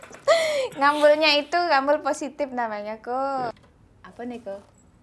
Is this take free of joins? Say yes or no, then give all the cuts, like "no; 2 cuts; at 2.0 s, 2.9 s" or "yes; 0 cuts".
no; 1 cut; at 3.6 s